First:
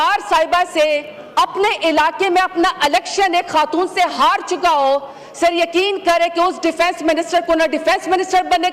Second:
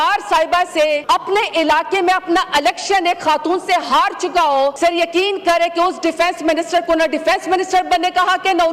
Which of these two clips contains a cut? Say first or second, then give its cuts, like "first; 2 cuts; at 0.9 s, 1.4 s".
second; 2 cuts; at 1.0 s, 4.7 s